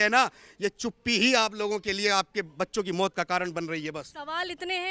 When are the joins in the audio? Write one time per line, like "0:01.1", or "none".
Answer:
none